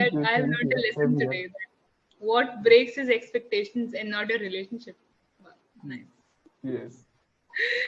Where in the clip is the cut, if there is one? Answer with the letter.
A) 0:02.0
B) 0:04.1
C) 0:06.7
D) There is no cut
D